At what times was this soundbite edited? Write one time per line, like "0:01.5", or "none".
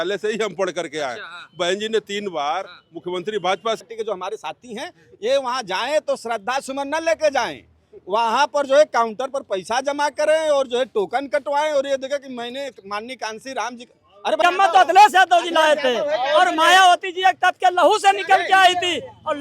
0:03.8
0:14.4